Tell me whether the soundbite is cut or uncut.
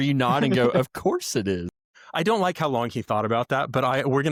uncut